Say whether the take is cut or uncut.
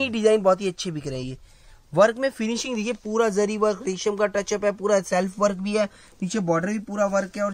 uncut